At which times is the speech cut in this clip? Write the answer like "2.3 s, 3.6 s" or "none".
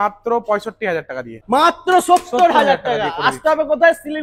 1.3 s

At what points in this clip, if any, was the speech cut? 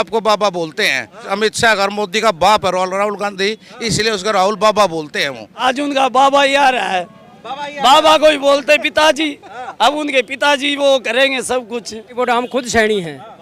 1.2 s, 5.5 s, 12.2 s

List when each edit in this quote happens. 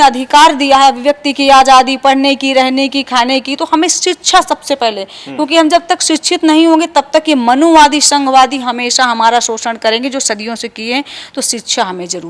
none

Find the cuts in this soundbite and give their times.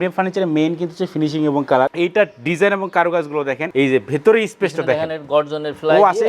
1.9 s, 3.7 s

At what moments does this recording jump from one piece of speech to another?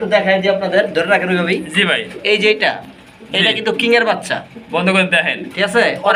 none

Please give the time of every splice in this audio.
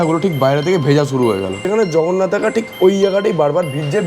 1.6 s

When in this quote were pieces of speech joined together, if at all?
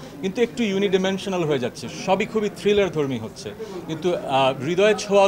none

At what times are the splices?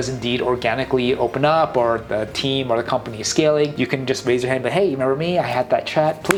none

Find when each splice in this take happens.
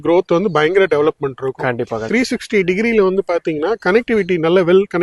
2.0 s

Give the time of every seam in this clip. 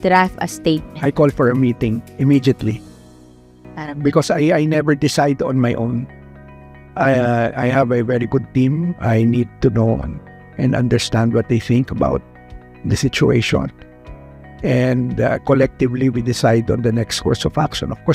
none

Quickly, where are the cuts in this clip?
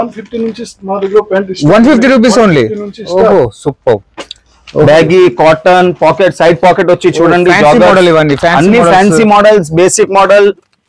none

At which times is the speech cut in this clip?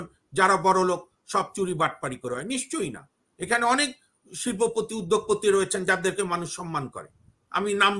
none

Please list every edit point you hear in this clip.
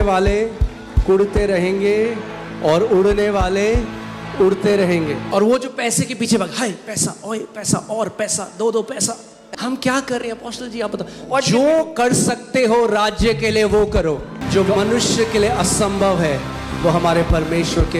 5.2 s, 9.3 s, 14.3 s

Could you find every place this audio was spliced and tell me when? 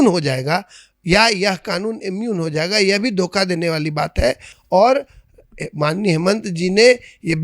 none

